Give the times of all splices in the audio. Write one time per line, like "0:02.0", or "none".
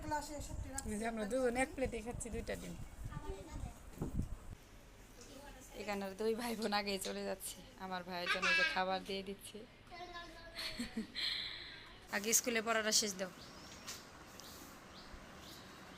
0:04.4
0:11.9